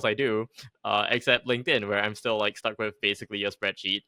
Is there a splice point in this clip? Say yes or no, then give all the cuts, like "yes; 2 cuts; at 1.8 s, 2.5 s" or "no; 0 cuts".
no; 0 cuts